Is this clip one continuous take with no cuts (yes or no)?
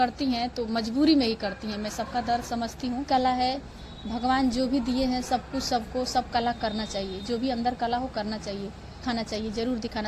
no